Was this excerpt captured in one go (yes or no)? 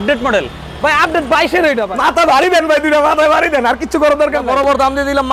no